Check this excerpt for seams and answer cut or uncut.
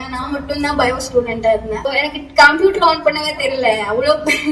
cut